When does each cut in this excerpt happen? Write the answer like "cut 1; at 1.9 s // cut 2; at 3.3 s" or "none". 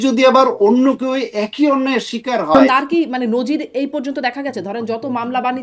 cut 1; at 2.6 s

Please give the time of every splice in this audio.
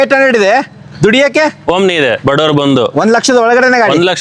none

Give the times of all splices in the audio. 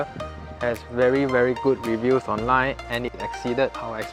cut 1; at 3.1 s

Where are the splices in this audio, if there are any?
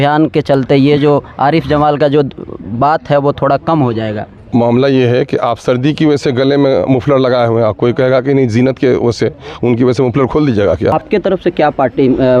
cut 1; at 11.0 s

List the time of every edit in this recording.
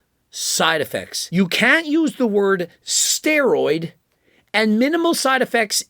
cut 1; at 1.2 s

